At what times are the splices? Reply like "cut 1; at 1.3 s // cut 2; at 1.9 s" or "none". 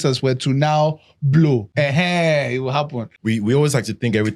cut 1; at 1.7 s // cut 2; at 3.1 s